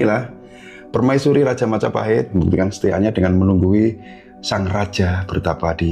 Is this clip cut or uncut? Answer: cut